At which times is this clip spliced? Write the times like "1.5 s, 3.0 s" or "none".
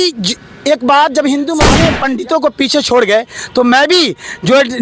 1.8 s